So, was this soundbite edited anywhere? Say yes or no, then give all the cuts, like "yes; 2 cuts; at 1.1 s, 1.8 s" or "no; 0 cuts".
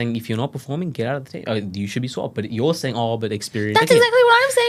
no; 0 cuts